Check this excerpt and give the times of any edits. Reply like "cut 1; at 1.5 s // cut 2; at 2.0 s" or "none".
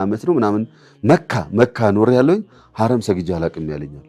none